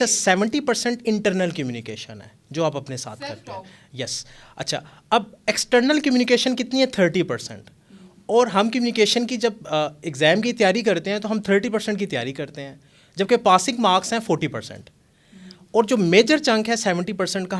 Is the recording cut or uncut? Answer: uncut